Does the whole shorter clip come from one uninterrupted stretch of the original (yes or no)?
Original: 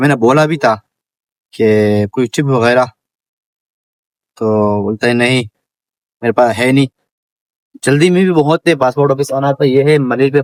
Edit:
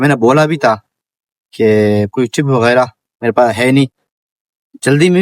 no